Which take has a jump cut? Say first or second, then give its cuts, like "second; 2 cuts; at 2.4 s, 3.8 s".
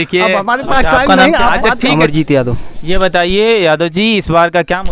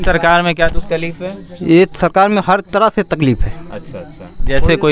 first; 1 cut; at 1.9 s